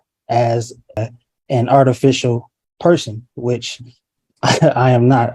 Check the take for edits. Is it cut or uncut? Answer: cut